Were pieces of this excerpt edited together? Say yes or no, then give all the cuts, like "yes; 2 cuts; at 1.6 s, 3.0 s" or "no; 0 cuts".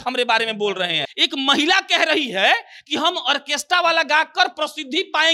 yes; 1 cut; at 1.1 s